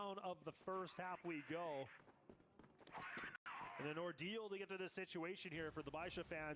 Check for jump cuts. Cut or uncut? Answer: uncut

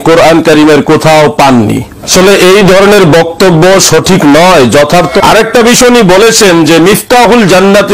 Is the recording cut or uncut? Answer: cut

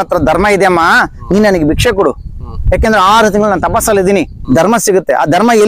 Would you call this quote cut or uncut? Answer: cut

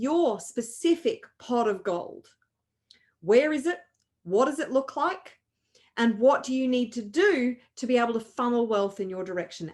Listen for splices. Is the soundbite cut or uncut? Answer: uncut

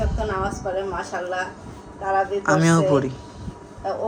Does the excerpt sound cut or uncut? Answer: uncut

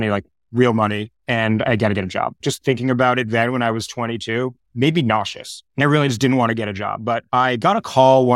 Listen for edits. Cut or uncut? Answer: uncut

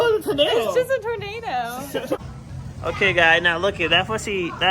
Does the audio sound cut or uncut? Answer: cut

